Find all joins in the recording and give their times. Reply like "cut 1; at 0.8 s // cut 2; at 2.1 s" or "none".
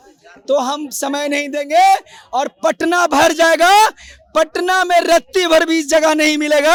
none